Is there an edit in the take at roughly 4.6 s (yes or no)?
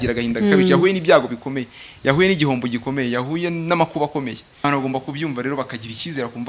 yes